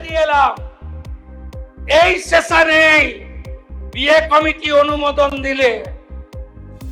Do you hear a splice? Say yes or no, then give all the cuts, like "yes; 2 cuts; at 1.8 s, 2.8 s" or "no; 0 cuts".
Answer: yes; 1 cut; at 5.9 s